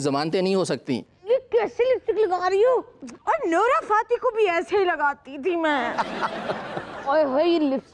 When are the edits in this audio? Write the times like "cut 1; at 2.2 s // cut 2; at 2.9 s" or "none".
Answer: cut 1; at 1.1 s